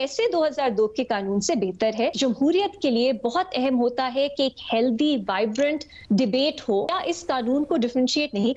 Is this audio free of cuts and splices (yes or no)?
no